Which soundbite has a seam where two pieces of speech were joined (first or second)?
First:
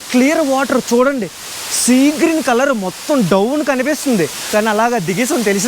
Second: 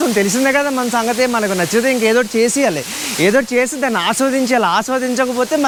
first